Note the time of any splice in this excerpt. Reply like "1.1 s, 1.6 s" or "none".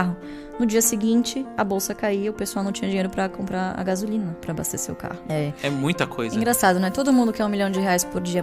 5.2 s

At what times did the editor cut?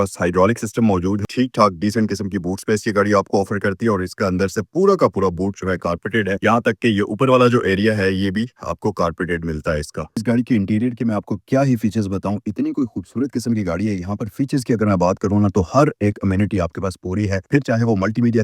none

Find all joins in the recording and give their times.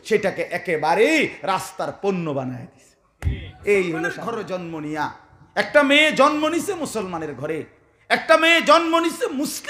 4.2 s

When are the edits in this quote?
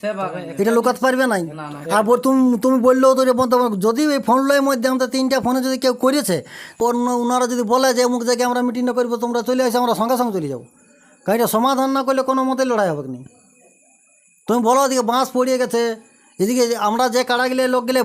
6.7 s

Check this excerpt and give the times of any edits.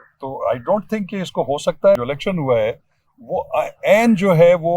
2.0 s

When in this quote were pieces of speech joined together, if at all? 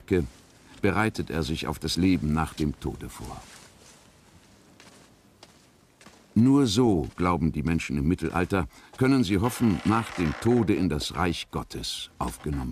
2.4 s

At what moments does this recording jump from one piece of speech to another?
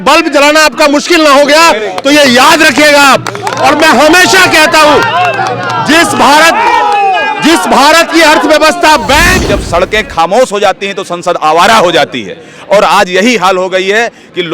9.3 s

